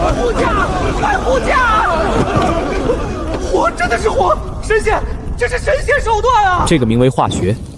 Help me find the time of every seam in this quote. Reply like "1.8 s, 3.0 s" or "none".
6.6 s